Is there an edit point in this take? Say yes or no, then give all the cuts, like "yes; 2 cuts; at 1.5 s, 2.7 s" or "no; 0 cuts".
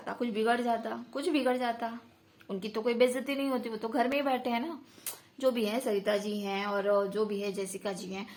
no; 0 cuts